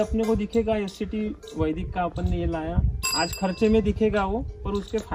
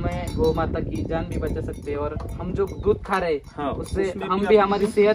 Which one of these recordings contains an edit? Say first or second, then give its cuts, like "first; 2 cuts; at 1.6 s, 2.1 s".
first; 1 cut; at 3.0 s